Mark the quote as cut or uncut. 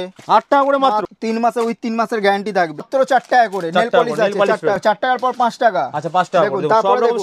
cut